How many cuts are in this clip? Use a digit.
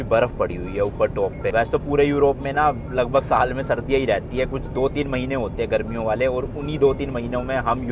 0